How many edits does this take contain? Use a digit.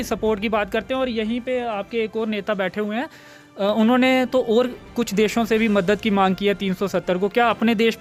0